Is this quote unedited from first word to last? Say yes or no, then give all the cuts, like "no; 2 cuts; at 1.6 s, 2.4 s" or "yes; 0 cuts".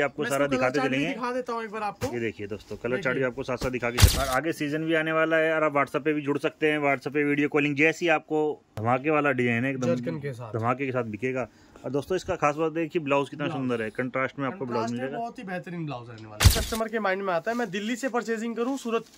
no; 3 cuts; at 4.1 s, 8.7 s, 16.5 s